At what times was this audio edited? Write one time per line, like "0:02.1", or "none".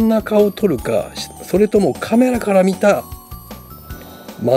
none